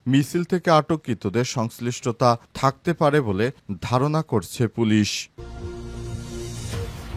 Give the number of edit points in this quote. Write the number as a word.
one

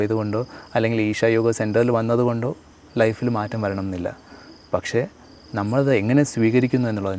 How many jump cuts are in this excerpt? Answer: zero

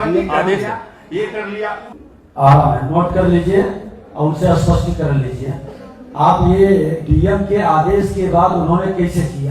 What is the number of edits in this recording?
one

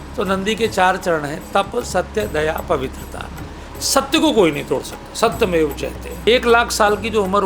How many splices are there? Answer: one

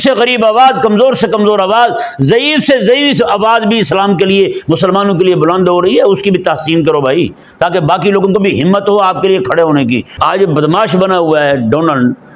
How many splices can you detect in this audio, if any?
one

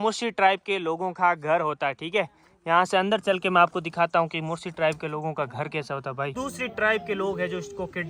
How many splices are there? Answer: one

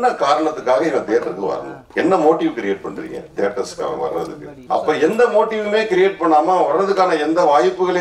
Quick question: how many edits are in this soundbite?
zero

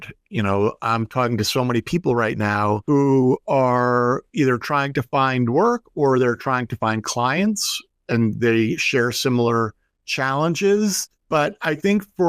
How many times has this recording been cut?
two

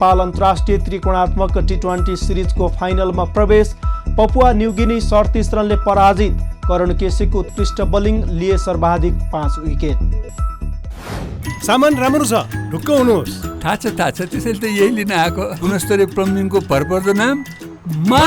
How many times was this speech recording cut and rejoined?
one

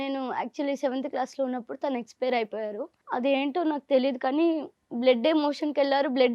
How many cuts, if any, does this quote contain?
one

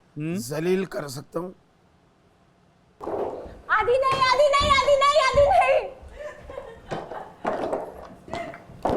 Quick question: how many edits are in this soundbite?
one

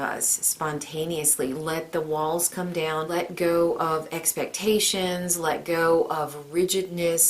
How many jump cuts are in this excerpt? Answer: one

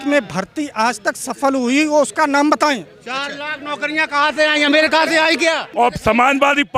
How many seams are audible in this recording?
one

